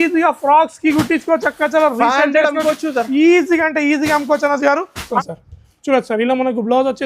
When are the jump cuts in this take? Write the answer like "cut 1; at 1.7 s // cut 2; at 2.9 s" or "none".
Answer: cut 1; at 5.1 s